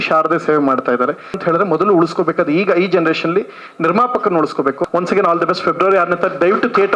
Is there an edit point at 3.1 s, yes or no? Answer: no